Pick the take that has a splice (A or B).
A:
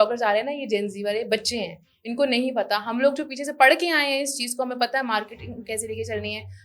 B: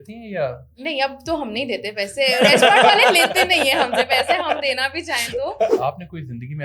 B